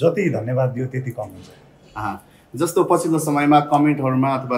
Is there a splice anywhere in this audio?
no; 0 cuts

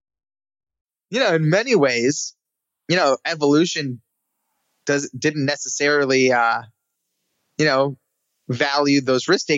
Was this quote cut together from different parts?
yes; 1 cut; at 1.2 s

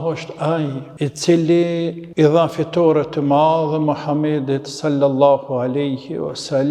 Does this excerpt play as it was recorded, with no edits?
no; 2 cuts; at 0.8 s, 2.0 s

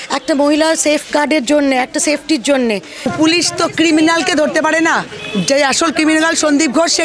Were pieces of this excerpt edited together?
yes; 1 cut; at 3.1 s

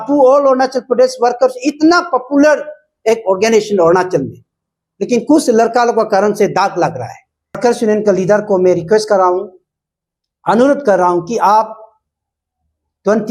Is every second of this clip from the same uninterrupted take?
no; 1 cut; at 7.6 s

